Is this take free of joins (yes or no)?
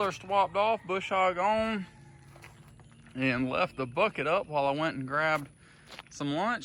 yes